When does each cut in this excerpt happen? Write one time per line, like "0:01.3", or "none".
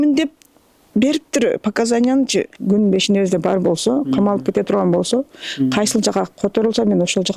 0:02.6